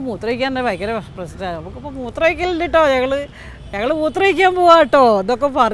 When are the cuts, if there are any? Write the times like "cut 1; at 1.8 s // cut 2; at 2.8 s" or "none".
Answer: none